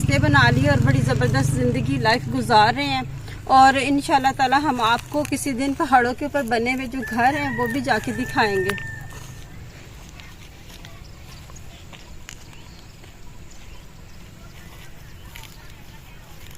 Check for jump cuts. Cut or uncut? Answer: uncut